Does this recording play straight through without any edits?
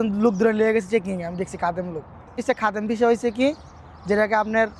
no; 1 cut; at 2.4 s

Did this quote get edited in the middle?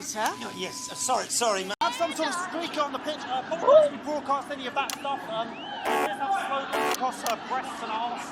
yes; 1 cut; at 1.8 s

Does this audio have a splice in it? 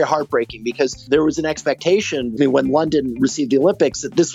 yes; 2 cuts; at 1.0 s, 2.3 s

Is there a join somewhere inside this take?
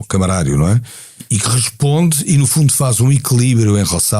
yes; 1 cut; at 1.3 s

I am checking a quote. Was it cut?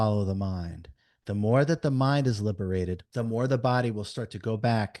yes; 1 cut; at 3.0 s

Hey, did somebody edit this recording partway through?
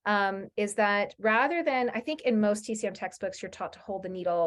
no; 0 cuts

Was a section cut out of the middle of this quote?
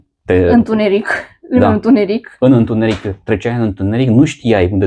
no; 0 cuts

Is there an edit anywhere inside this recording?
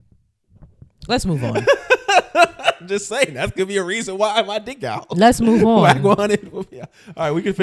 no; 0 cuts

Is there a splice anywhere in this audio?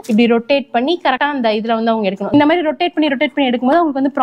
yes; 2 cuts; at 1.2 s, 2.3 s

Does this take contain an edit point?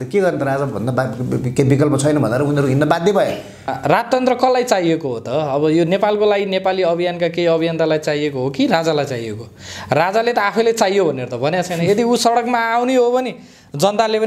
yes; 1 cut; at 3.7 s

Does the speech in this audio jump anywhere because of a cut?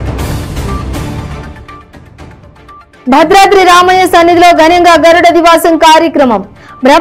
yes; 2 cuts; at 1.3 s, 2.8 s

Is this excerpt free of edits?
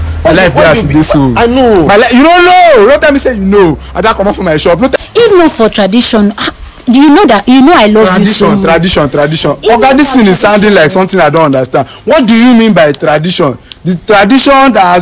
no; 1 cut; at 4.9 s

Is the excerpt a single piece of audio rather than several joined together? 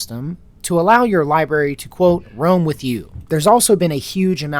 no; 1 cut; at 3.1 s

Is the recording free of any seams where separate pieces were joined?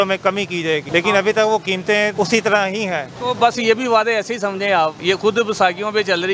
no; 4 cuts; at 0.8 s, 2.1 s, 3.1 s, 5.0 s

